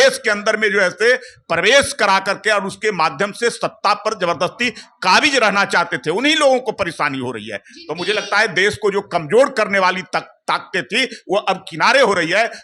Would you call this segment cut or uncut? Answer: uncut